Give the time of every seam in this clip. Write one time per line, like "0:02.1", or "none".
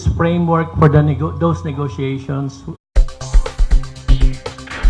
none